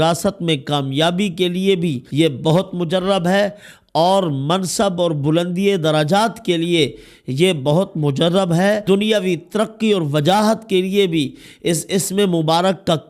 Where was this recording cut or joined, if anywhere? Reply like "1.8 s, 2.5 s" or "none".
2.0 s, 8.8 s